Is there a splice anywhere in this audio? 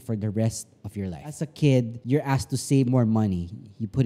yes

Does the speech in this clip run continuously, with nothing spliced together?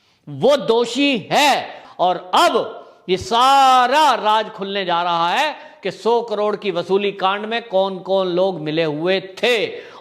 no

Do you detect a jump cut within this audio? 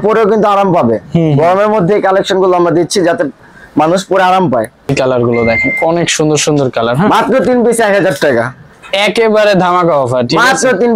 yes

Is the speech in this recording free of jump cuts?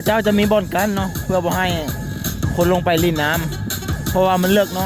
yes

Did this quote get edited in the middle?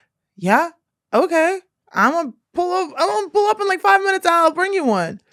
no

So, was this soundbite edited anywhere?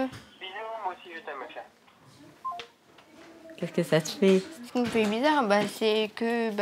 no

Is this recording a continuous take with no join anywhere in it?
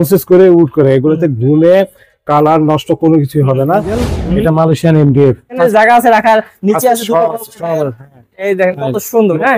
no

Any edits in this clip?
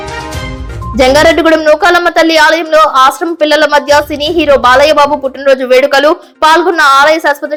no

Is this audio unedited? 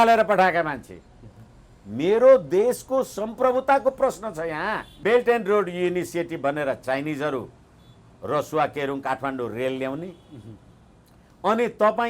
no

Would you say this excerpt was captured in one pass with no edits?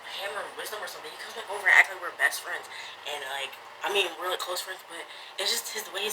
yes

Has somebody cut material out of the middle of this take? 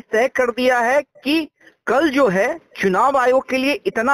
no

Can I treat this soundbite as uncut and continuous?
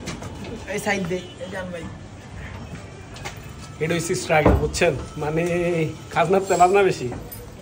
yes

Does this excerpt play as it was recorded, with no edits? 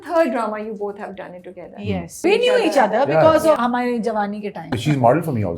no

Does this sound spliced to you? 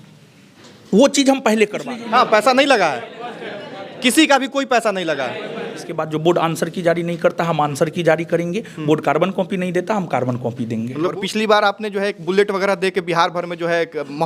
yes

